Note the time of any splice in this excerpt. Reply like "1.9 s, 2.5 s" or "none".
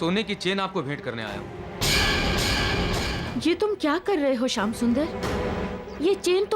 3.2 s